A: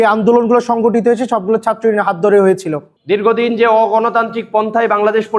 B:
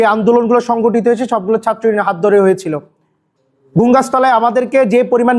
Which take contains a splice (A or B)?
A